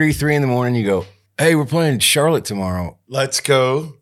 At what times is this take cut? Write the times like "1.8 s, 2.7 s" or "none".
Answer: 1.2 s, 3.0 s